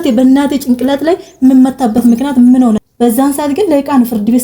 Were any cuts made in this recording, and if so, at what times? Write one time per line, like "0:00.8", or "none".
0:02.8

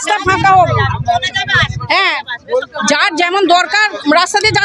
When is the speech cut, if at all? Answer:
none

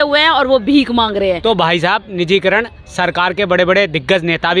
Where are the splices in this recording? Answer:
0:01.4

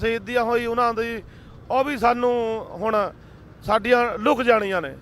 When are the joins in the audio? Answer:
0:01.1

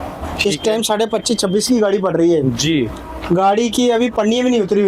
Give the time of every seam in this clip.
none

